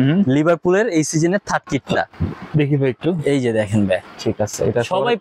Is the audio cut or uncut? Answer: uncut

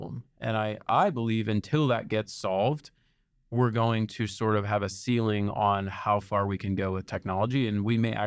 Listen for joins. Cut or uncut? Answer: uncut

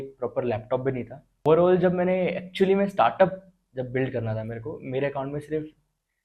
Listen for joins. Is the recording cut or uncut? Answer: cut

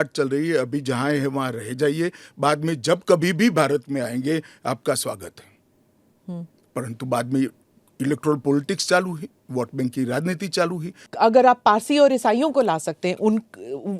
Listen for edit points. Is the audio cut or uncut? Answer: cut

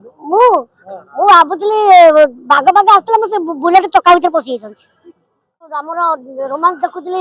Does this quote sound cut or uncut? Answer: cut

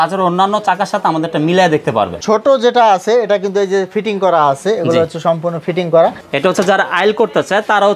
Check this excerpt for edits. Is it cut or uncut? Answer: cut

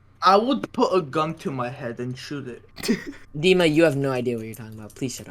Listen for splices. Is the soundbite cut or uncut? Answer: cut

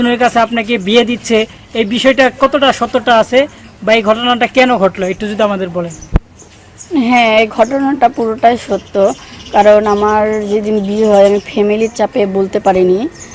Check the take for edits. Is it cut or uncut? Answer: uncut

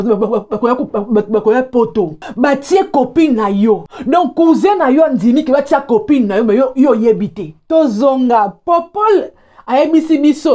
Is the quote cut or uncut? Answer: cut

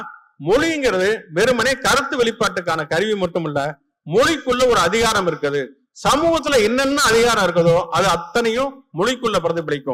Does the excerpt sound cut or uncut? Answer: uncut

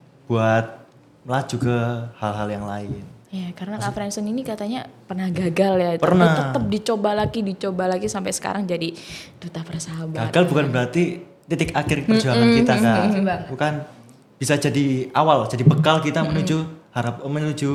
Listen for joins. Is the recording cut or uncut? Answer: uncut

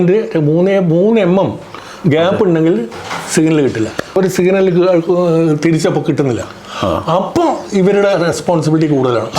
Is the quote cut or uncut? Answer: cut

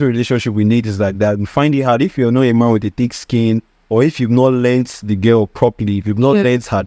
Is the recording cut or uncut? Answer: uncut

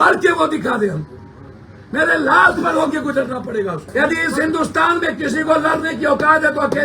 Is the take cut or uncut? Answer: cut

